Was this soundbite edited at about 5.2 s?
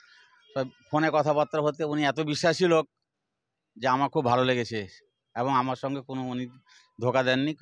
no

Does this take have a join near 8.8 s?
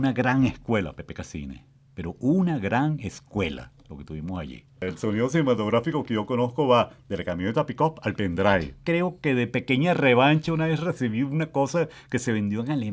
yes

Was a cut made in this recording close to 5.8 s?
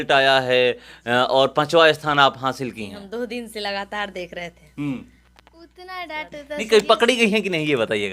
yes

